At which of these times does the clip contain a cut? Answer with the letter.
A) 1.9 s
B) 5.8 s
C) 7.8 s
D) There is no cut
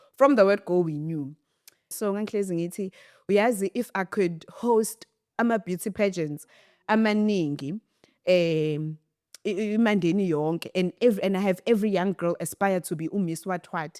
A